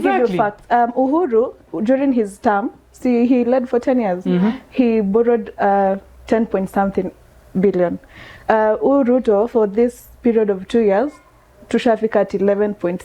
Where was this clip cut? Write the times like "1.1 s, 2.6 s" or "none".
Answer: none